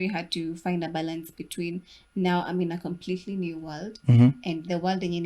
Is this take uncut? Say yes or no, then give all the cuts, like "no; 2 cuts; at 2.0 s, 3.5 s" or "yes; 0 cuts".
yes; 0 cuts